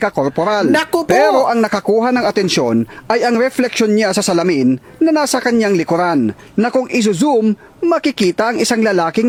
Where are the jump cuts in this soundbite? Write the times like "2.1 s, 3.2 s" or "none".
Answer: none